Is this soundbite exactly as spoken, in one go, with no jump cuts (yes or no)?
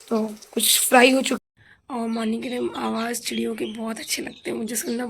no